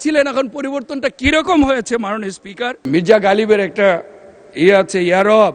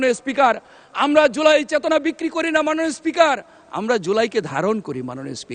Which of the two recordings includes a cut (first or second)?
first